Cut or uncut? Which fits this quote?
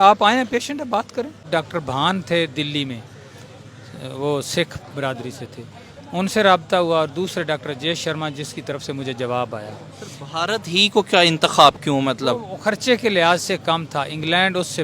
cut